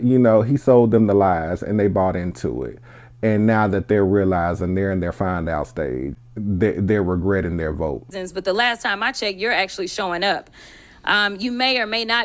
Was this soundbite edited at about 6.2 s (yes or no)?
yes